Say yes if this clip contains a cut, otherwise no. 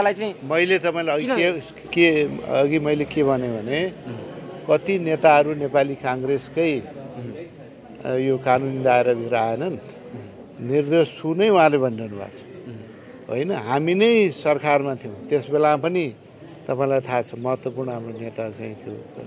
no